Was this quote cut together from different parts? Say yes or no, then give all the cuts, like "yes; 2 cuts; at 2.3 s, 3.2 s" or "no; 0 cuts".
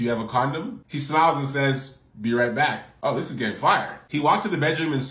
no; 0 cuts